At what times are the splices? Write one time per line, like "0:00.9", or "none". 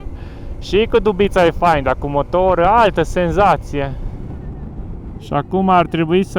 0:04.4